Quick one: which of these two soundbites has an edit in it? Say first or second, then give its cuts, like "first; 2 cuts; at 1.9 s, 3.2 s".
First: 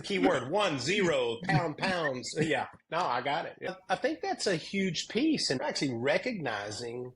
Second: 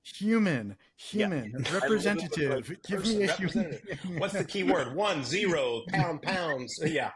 first; 2 cuts; at 3.7 s, 5.6 s